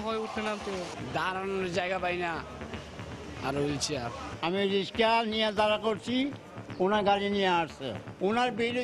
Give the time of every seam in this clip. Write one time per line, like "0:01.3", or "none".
0:00.9
0:04.3